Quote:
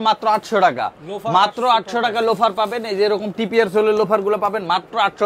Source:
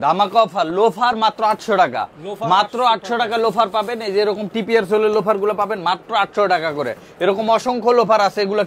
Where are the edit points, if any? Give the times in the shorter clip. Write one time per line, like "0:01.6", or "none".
none